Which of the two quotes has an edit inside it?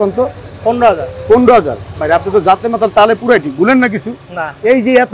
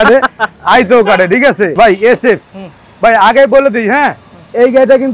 second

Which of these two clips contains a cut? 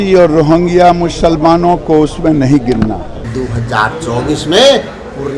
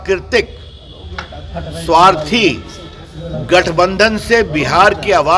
first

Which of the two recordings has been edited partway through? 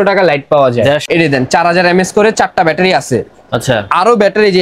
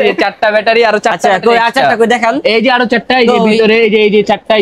first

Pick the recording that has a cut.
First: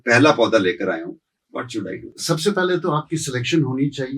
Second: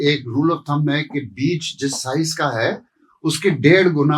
first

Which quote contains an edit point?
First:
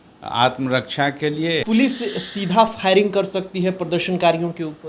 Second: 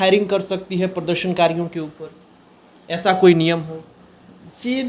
first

